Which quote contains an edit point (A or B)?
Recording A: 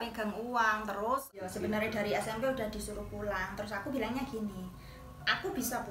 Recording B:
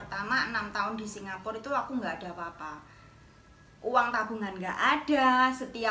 A